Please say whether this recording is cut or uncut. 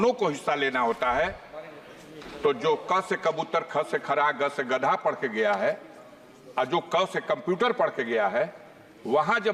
uncut